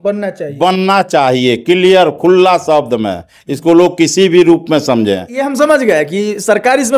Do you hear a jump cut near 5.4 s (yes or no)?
yes